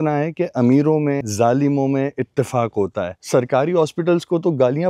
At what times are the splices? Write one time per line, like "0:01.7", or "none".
0:01.3
0:03.2